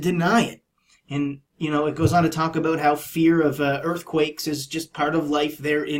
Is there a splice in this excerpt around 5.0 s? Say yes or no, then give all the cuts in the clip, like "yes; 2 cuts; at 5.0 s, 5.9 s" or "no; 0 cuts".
yes; 1 cut; at 5.0 s